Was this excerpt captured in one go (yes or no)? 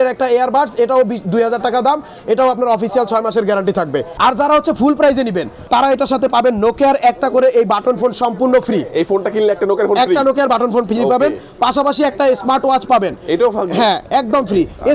no